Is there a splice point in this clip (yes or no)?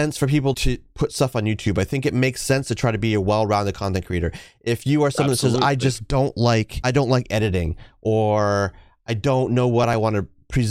no